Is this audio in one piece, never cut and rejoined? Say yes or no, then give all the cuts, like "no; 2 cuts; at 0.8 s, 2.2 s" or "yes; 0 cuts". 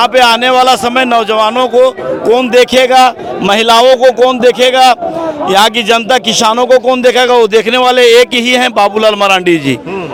yes; 0 cuts